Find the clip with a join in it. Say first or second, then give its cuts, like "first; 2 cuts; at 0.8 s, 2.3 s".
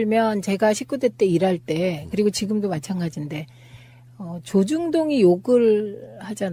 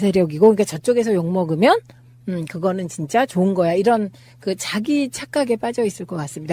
second; 1 cut; at 2.5 s